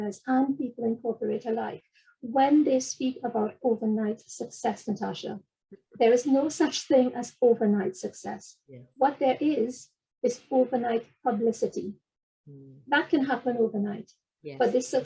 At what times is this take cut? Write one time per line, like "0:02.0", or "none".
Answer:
none